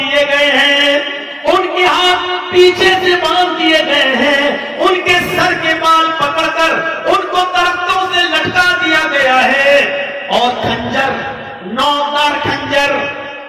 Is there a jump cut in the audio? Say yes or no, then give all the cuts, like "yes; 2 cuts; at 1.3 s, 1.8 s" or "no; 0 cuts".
no; 0 cuts